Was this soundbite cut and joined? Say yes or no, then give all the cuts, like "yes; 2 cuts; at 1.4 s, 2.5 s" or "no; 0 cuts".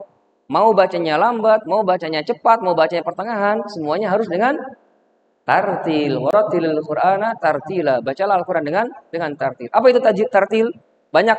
no; 0 cuts